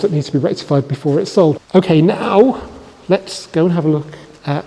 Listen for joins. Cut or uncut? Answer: cut